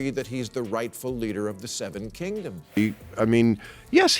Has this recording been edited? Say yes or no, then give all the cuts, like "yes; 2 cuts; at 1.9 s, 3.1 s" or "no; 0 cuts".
yes; 1 cut; at 2.6 s